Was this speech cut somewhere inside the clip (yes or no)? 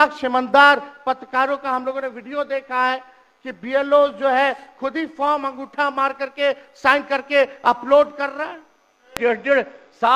yes